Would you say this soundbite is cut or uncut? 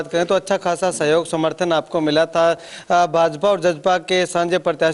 uncut